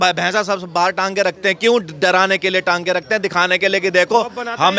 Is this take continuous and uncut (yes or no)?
yes